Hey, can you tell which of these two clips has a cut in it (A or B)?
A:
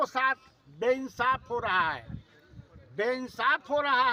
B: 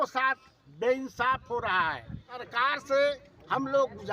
B